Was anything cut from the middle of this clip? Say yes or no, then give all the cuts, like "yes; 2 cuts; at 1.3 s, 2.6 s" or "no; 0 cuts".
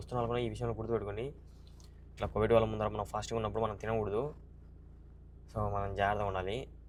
no; 0 cuts